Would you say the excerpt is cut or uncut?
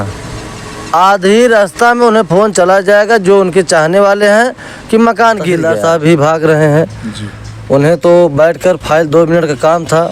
cut